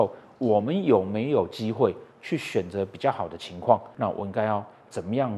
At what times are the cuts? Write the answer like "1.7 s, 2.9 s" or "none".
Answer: 3.9 s